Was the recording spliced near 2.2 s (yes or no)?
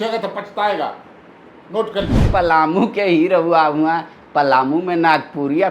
yes